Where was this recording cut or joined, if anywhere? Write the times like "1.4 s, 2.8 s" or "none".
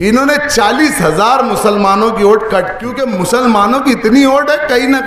2.9 s